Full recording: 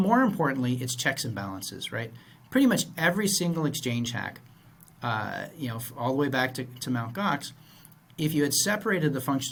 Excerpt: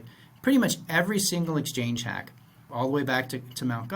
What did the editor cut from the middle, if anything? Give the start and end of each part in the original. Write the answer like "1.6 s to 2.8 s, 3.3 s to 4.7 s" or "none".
4.7 s to 5.8 s